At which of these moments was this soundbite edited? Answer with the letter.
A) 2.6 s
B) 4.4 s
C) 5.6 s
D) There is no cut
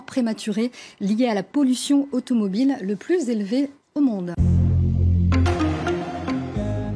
B